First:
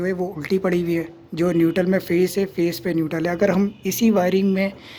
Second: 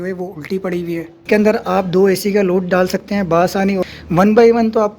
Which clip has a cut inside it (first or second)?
second